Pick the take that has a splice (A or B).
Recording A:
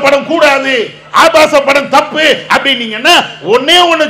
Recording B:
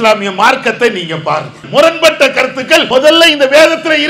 B